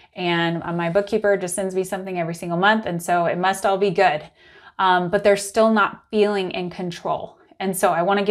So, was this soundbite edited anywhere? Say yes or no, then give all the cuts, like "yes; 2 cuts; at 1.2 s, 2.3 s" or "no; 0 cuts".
no; 0 cuts